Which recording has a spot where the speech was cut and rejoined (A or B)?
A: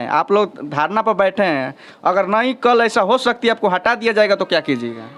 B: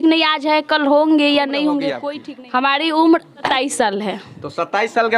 B